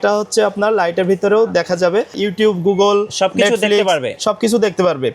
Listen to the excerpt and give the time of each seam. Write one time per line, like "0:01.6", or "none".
0:02.2

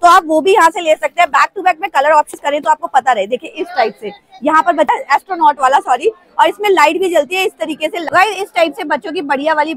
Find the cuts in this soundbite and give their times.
0:02.3
0:04.9
0:08.0

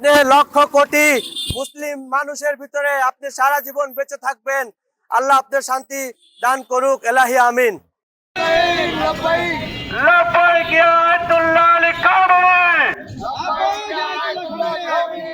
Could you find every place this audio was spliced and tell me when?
none

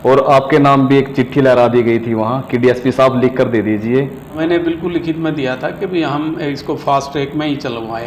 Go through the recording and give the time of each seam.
0:04.4

